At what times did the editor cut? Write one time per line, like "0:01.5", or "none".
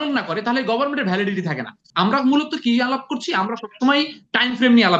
0:01.8